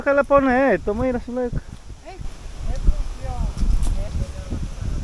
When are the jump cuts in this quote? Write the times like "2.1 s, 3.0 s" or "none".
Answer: 2.2 s, 4.1 s